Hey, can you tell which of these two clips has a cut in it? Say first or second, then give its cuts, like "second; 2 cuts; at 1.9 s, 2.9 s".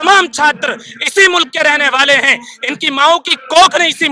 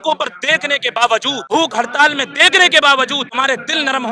second; 2 cuts; at 1.4 s, 3.3 s